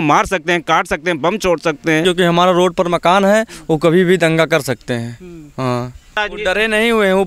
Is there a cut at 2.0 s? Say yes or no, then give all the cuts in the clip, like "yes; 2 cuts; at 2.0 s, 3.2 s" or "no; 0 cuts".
yes; 2 cuts; at 2.0 s, 6.2 s